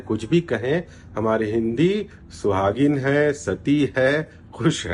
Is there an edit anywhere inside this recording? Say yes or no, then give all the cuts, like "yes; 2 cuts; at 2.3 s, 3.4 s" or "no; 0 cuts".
no; 0 cuts